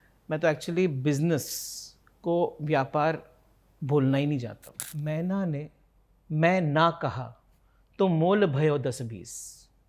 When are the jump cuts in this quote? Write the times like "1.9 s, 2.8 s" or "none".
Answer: 4.8 s